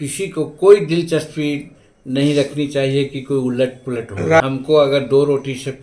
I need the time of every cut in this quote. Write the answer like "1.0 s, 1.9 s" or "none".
4.4 s